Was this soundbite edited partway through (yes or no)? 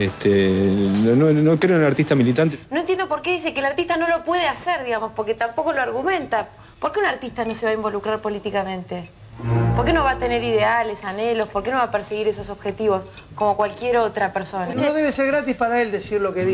yes